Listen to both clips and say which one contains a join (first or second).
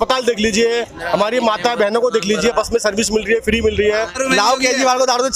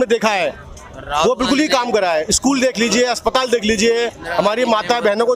first